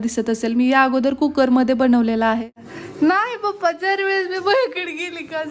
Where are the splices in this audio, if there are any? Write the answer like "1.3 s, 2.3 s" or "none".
2.5 s